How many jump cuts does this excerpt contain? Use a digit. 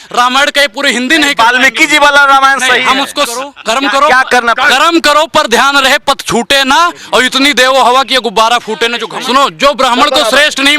2